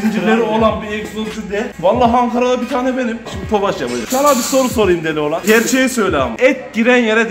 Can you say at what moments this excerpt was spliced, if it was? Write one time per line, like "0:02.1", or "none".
0:03.8
0:05.4
0:06.3